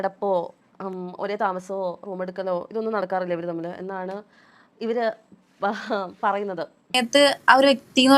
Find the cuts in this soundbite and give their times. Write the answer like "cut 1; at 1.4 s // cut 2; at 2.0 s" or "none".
cut 1; at 6.9 s